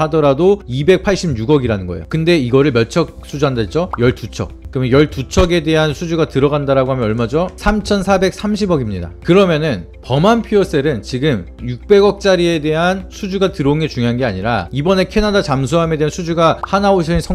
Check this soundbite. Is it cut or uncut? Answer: uncut